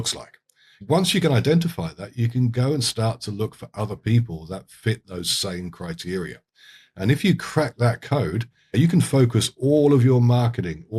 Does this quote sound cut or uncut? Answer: cut